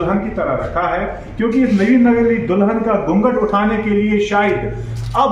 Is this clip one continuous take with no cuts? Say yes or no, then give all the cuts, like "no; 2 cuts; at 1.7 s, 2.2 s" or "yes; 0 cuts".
yes; 0 cuts